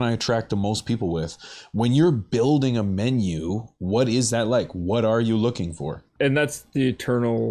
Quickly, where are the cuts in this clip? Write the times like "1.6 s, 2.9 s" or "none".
6.1 s